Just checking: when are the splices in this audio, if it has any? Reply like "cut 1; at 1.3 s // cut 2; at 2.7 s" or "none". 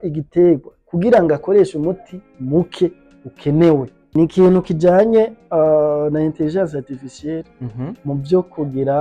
cut 1; at 4.0 s